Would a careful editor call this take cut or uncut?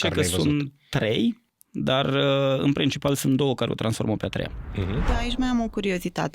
cut